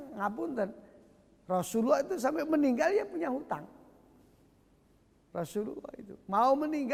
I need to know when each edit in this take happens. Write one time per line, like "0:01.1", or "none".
none